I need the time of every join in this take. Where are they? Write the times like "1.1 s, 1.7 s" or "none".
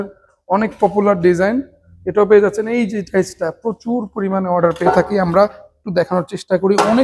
none